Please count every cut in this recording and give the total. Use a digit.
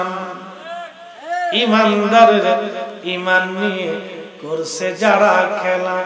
0